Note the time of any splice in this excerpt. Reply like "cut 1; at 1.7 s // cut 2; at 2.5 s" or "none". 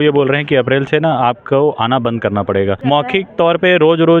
cut 1; at 2.8 s